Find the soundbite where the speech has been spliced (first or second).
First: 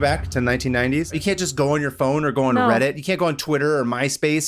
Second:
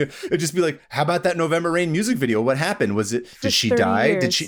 first